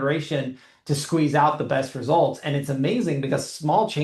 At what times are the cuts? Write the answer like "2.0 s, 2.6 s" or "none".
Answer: none